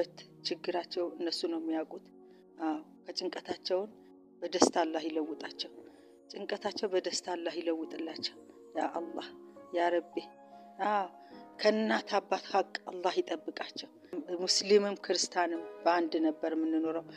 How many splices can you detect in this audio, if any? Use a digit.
1